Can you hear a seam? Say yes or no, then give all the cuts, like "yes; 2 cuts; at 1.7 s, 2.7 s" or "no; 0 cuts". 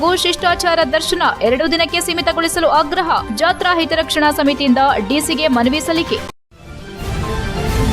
yes; 1 cut; at 6.3 s